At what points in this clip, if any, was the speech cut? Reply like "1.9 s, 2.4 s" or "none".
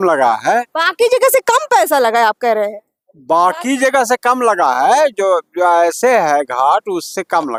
none